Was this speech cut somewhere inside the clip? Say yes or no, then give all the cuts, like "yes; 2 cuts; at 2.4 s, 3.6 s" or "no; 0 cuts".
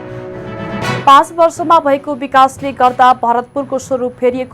yes; 1 cut; at 1.0 s